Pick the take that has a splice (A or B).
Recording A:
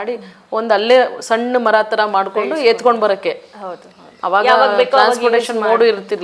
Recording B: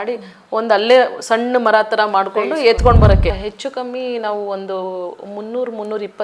B